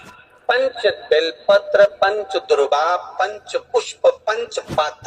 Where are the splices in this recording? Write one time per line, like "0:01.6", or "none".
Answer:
none